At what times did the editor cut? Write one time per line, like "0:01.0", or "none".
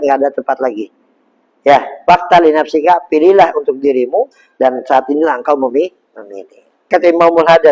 0:06.8